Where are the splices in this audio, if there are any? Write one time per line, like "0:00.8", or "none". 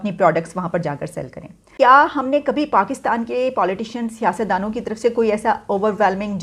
0:01.7